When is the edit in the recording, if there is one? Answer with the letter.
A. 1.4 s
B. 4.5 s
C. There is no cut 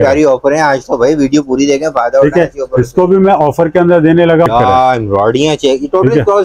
B